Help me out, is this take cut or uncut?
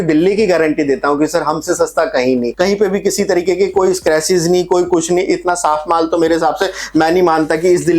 cut